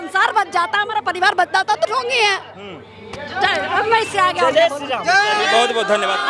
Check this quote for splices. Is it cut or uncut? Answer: uncut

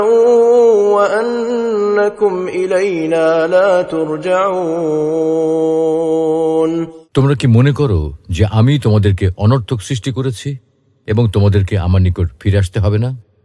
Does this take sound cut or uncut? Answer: cut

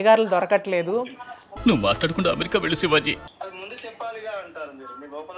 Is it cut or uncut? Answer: cut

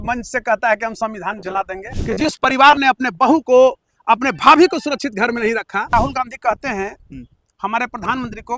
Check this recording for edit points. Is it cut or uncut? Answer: cut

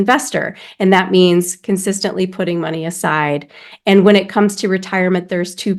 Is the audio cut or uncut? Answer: uncut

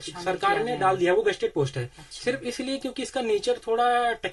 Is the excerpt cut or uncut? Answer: uncut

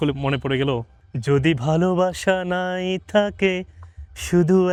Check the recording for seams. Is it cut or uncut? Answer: uncut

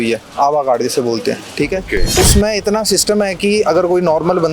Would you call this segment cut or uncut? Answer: cut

